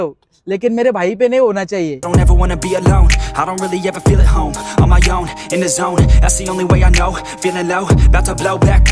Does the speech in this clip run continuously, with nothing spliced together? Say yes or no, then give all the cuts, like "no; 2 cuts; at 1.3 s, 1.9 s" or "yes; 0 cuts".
no; 1 cut; at 2.1 s